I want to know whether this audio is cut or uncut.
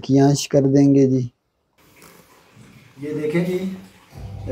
cut